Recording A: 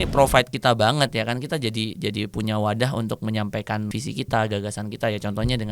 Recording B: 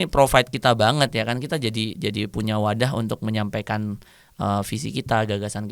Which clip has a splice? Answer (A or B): A